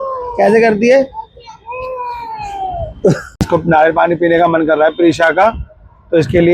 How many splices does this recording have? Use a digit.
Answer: 1